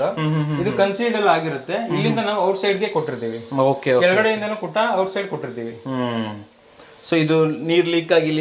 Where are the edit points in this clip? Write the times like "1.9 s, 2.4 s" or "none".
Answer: none